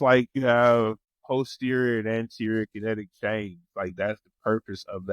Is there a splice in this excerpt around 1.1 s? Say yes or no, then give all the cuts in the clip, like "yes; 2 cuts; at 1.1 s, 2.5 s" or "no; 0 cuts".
yes; 1 cut; at 1.1 s